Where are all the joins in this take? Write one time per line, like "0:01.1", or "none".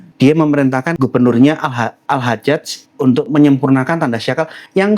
0:00.9